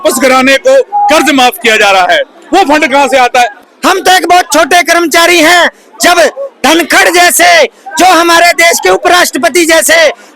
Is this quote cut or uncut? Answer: cut